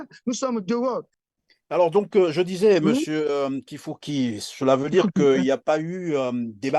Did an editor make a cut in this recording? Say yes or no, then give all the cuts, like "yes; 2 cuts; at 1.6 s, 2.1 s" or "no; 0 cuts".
yes; 1 cut; at 1.2 s